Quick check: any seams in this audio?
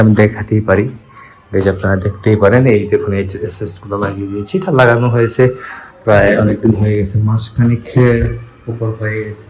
no; 0 cuts

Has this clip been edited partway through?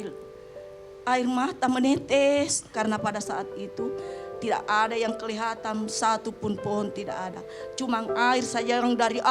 yes; 1 cut; at 2.6 s

